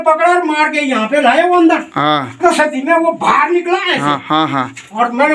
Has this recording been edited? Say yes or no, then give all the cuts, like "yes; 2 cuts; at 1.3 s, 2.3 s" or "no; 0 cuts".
yes; 1 cut; at 2.4 s